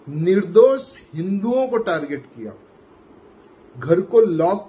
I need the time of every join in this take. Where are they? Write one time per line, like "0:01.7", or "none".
none